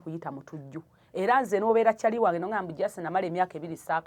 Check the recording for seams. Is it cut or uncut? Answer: uncut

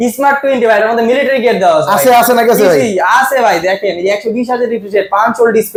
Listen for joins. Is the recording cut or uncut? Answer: uncut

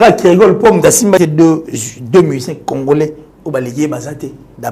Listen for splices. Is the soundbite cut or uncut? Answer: cut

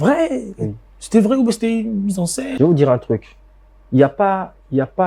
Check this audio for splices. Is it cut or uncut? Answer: cut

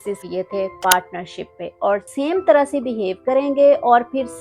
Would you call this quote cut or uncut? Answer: cut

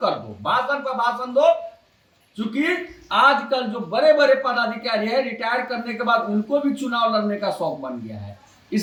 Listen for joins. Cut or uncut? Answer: uncut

